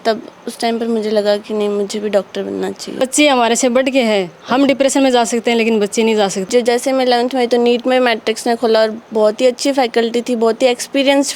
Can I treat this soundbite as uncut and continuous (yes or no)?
no